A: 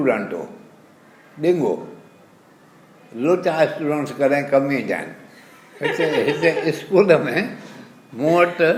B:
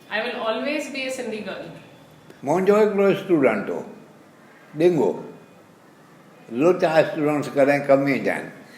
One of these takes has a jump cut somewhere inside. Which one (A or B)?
B